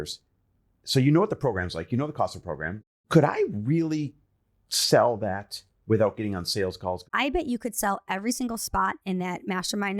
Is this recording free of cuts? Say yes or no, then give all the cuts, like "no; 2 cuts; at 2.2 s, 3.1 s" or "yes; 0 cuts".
no; 2 cuts; at 2.7 s, 7.1 s